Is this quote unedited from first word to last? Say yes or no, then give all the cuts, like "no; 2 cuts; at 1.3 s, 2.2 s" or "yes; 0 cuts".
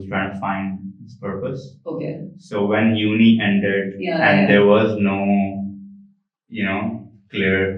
yes; 0 cuts